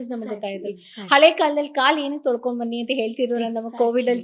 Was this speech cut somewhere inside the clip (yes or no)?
no